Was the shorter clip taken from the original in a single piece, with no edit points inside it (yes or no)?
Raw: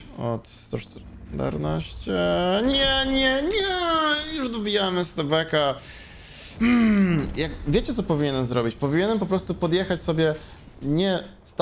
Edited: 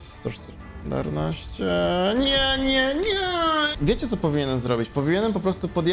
no